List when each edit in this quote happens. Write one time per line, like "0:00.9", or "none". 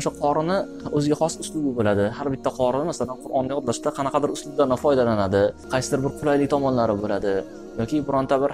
0:00.8
0:05.6

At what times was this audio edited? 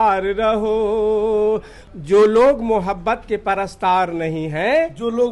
0:01.8

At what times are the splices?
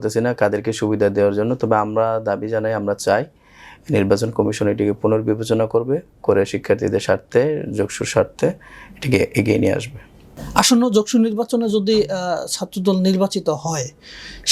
none

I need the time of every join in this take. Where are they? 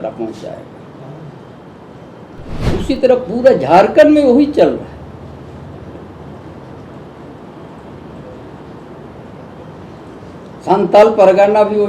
0:02.6

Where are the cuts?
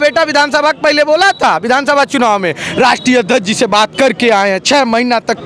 none

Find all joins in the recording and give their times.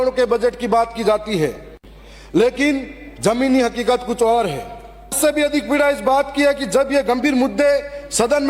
0:05.1

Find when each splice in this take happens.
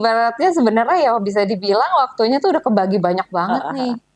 none

